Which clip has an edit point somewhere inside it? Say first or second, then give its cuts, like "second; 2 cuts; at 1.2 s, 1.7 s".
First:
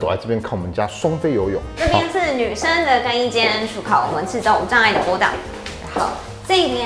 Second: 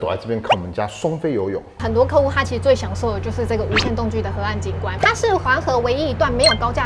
second; 1 cut; at 1.8 s